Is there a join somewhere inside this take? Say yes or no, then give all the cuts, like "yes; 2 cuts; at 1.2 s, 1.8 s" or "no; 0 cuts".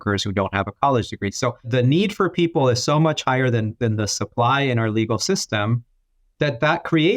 yes; 1 cut; at 1.6 s